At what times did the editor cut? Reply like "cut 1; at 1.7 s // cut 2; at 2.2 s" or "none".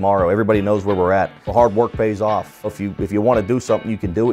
cut 1; at 1.5 s // cut 2; at 2.7 s